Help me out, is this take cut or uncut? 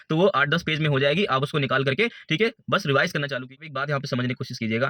cut